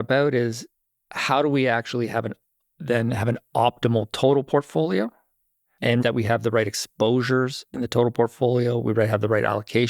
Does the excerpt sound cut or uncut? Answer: cut